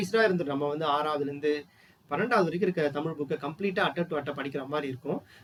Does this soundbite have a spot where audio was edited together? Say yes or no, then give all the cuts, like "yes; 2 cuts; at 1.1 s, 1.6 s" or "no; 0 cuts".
no; 0 cuts